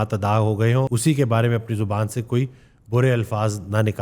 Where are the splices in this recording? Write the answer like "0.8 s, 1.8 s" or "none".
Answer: 0.9 s